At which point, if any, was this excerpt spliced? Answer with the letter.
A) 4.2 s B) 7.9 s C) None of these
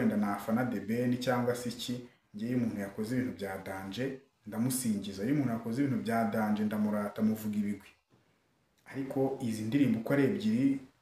C